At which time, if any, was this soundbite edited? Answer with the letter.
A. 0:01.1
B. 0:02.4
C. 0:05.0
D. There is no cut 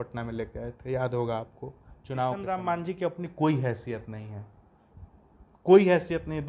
B